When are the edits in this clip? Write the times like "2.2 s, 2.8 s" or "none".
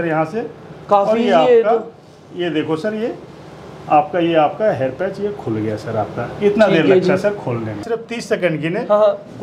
7.9 s